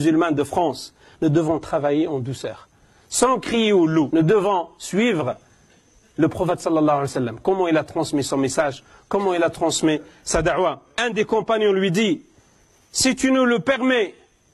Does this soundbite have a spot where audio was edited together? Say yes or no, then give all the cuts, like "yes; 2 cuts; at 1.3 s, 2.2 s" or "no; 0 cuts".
yes; 2 cuts; at 4.1 s, 10.9 s